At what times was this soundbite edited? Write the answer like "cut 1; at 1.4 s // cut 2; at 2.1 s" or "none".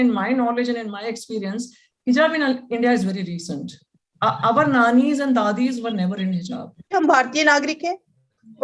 cut 1; at 6.9 s